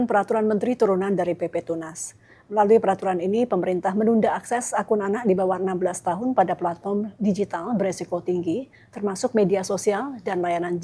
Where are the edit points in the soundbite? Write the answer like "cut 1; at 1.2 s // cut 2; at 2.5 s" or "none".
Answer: none